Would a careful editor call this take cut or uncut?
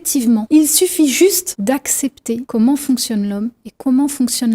uncut